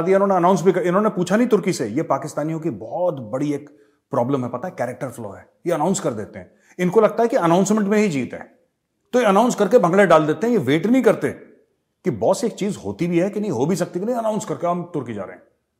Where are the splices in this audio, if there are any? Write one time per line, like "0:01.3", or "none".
none